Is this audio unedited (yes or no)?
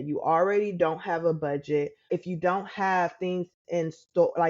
no